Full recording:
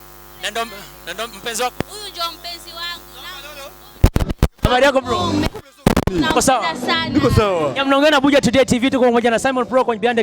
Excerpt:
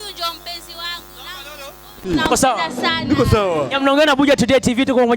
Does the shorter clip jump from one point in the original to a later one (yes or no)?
yes